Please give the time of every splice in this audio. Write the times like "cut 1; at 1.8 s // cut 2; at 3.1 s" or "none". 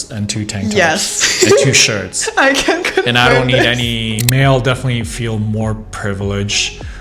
cut 1; at 4.2 s